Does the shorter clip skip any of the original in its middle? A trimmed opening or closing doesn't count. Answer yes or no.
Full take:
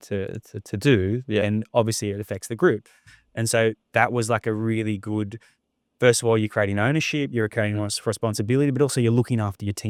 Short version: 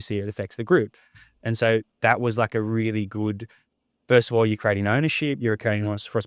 no